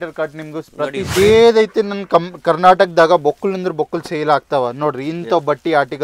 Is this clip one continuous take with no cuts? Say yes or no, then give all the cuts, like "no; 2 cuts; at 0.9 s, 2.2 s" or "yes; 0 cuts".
no; 1 cut; at 1.1 s